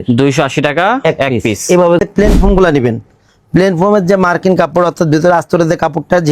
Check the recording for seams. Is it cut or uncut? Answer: cut